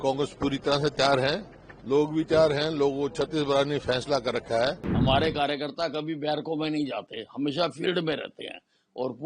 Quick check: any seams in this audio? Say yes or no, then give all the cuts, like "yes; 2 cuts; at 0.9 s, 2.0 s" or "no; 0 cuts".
yes; 1 cut; at 4.9 s